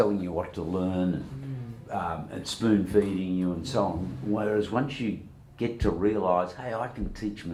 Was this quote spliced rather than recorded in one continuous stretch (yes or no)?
no